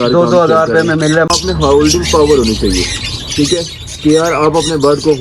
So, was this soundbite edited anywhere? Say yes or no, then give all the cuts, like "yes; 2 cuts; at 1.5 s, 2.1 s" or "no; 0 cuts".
yes; 1 cut; at 1.3 s